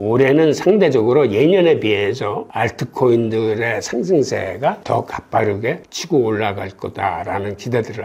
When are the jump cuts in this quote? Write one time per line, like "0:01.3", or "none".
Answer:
0:04.8
0:05.9